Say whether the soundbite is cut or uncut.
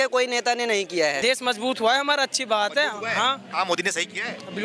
cut